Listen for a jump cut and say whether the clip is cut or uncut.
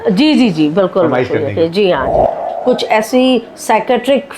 cut